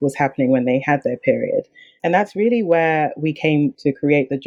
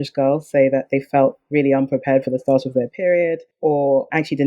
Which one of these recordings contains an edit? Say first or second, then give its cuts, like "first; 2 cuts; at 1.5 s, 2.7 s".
second; 1 cut; at 3.5 s